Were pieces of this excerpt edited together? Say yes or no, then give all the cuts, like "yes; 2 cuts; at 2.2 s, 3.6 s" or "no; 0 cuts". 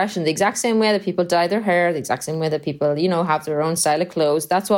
no; 0 cuts